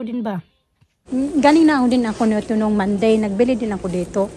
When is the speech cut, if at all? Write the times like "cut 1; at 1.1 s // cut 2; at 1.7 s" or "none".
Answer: cut 1; at 1.0 s